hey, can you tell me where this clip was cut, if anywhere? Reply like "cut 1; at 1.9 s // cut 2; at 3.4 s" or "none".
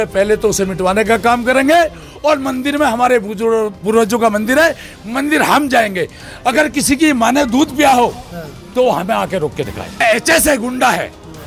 cut 1; at 10.0 s